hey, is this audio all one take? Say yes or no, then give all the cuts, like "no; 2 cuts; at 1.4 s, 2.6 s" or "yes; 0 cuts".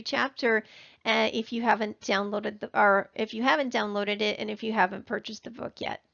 no; 1 cut; at 2.2 s